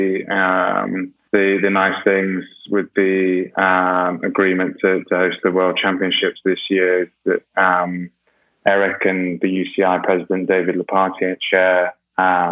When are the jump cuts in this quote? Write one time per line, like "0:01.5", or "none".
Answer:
0:01.1